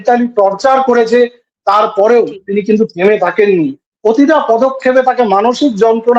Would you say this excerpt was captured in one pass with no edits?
yes; 0 cuts

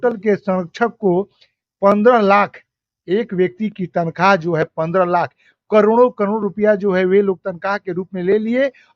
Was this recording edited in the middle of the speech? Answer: no; 0 cuts

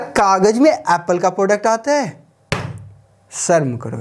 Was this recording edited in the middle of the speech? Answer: no; 0 cuts

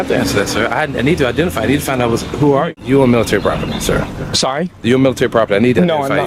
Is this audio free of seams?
no; 1 cut; at 2.7 s

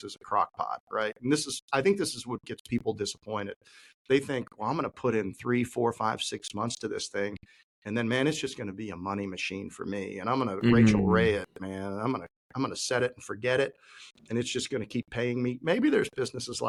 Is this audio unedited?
yes; 0 cuts

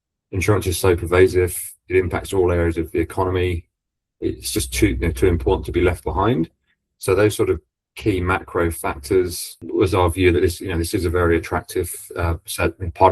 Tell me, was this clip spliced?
yes; 1 cut; at 9.6 s

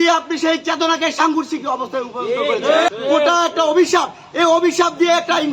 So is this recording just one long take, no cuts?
no; 1 cut; at 2.9 s

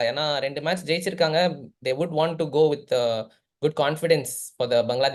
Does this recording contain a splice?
no; 0 cuts

